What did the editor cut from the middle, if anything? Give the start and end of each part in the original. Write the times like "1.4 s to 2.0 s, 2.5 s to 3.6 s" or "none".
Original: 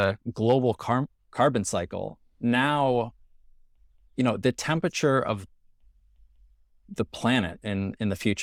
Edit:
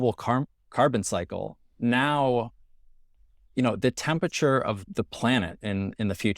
5.5 s to 6.9 s

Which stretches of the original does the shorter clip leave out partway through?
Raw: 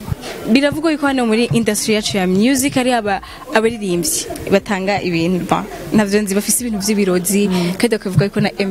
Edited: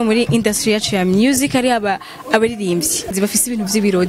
4.4 s to 6.3 s

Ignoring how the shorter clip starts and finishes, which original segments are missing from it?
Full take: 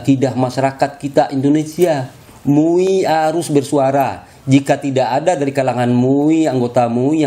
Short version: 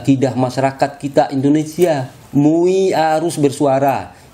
2.1 s to 2.3 s

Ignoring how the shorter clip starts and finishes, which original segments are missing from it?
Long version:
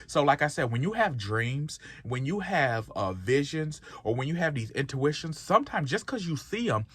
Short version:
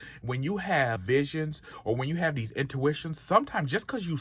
2.8 s to 3.2 s

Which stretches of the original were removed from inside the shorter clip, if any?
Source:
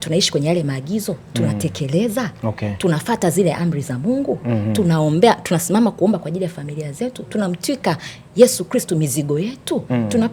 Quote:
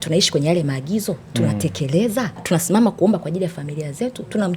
2.4 s to 5.4 s

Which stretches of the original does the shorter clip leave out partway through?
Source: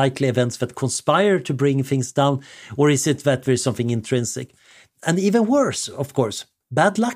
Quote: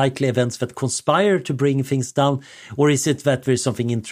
none

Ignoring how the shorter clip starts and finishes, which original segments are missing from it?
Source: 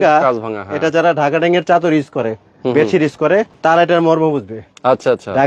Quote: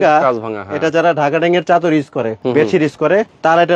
2.4 s to 2.6 s

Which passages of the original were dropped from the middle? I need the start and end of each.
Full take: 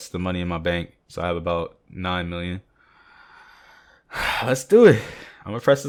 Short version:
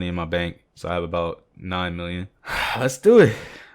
2.7 s to 4.0 s

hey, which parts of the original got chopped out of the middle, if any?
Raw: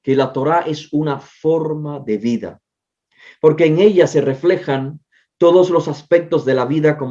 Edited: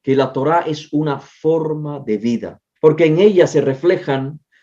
2.6 s to 3.2 s

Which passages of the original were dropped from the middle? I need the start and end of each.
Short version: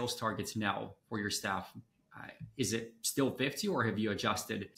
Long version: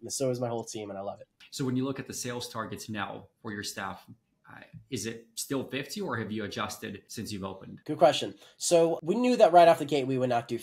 none

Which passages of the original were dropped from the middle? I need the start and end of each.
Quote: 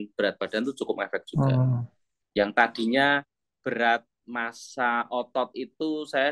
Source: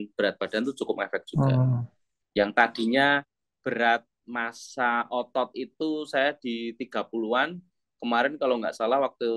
none

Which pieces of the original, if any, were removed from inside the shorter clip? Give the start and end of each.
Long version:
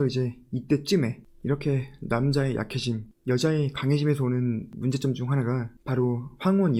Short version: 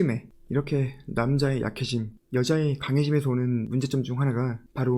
4.6 s to 4.8 s

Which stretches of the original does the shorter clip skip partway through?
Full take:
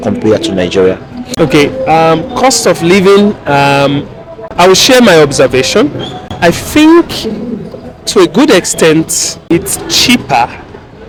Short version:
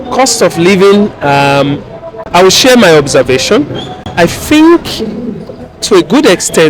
none

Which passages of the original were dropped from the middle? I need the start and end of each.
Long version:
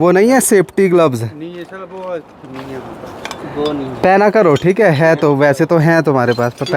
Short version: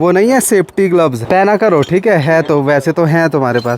1.2 s to 3.9 s

